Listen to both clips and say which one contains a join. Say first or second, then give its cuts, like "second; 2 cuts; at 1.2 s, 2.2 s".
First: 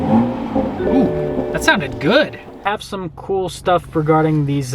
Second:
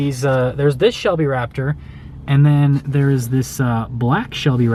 first; 1 cut; at 2.6 s